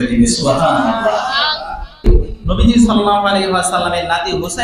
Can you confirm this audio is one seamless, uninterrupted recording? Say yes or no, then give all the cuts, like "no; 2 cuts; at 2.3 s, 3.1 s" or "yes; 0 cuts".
no; 1 cut; at 2.0 s